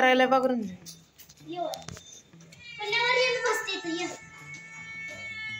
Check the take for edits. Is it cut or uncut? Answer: uncut